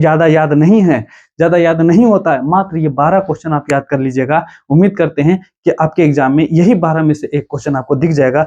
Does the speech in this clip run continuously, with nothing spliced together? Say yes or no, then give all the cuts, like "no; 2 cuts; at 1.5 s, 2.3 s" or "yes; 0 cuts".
yes; 0 cuts